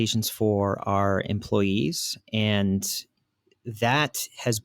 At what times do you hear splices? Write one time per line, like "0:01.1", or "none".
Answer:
none